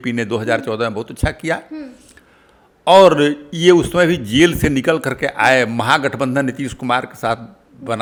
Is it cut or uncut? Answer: uncut